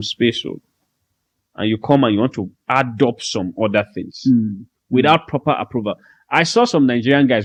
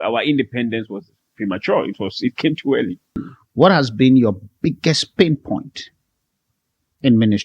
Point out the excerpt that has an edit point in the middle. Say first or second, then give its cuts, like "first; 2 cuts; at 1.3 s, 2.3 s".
second; 1 cut; at 3.4 s